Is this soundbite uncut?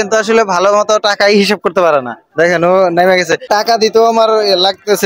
no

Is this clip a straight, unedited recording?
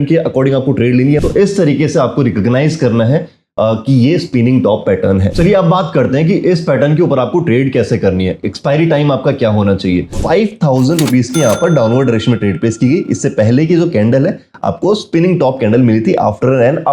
no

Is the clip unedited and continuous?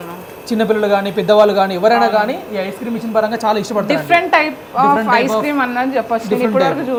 yes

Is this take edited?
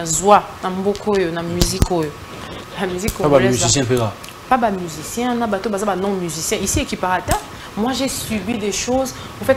yes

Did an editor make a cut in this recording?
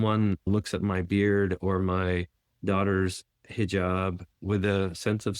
yes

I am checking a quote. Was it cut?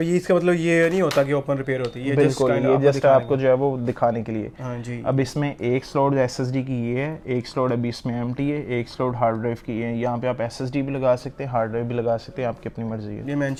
no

